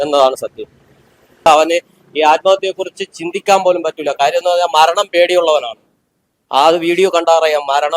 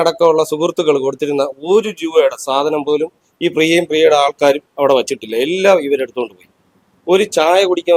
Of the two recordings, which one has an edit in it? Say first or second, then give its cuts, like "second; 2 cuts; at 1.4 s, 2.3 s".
first; 1 cut; at 1.5 s